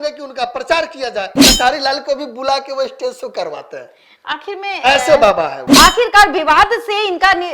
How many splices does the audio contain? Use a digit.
2